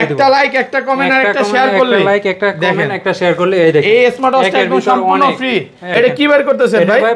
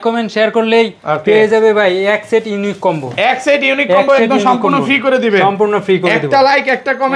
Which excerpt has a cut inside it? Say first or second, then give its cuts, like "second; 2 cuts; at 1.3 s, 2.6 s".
first; 1 cut; at 5.9 s